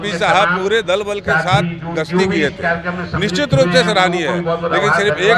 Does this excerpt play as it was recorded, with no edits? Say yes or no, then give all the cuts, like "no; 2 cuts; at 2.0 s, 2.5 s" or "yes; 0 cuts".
yes; 0 cuts